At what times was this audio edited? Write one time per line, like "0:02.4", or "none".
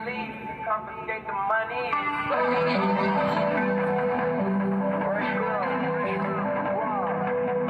0:04.3